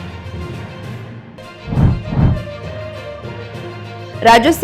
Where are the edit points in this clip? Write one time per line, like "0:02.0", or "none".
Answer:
0:01.3